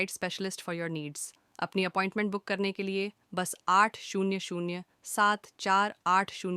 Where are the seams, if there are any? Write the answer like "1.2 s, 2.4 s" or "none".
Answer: 2.3 s